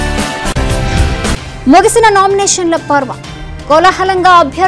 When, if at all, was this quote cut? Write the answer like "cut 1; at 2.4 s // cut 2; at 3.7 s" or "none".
cut 1; at 1.4 s